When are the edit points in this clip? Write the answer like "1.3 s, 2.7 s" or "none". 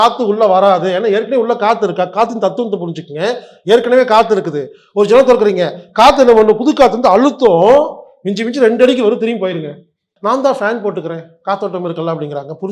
10.1 s